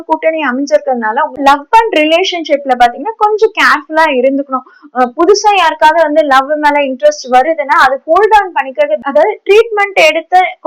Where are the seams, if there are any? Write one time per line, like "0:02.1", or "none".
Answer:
0:01.4
0:09.0